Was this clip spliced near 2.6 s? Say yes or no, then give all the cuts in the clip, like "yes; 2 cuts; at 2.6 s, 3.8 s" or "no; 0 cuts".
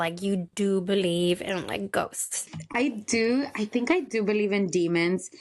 yes; 1 cut; at 2.6 s